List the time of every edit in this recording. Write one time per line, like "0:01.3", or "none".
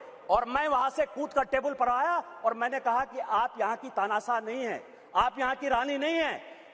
none